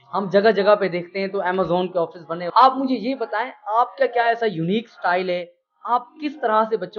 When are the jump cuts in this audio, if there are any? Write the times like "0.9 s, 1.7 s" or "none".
2.5 s